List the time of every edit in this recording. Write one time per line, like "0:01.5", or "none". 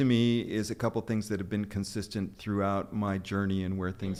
none